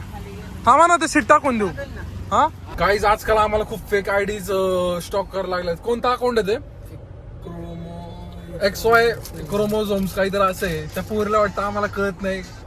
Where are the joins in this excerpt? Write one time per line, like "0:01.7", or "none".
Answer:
0:02.6